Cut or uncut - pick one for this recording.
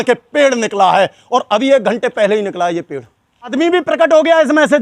cut